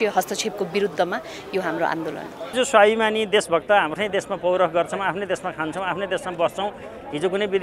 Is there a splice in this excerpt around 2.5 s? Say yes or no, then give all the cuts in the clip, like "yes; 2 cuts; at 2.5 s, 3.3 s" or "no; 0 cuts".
yes; 1 cut; at 2.5 s